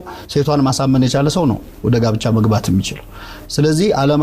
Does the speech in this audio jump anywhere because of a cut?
no; 0 cuts

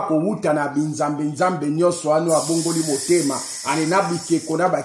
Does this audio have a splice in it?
no; 0 cuts

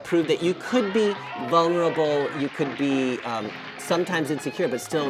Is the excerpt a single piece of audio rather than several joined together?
yes; 0 cuts

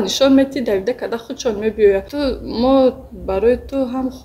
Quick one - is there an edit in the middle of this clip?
yes; 1 cut; at 2.1 s

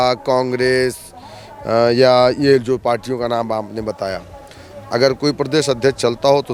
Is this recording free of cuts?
yes; 0 cuts

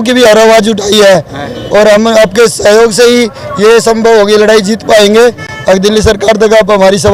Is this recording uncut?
yes; 0 cuts

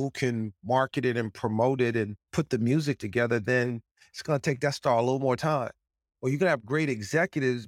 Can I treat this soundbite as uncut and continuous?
yes; 0 cuts

